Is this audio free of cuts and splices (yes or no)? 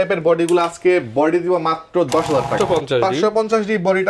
no